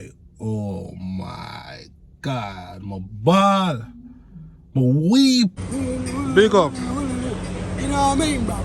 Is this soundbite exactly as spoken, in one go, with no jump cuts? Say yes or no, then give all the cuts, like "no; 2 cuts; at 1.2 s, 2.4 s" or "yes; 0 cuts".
no; 1 cut; at 5.7 s